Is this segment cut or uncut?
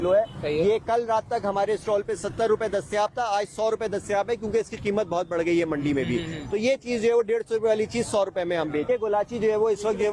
cut